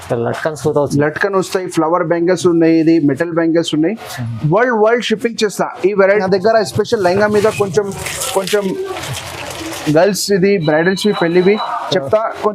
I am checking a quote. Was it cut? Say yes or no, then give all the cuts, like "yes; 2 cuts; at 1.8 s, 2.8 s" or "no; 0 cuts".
yes; 1 cut; at 6.1 s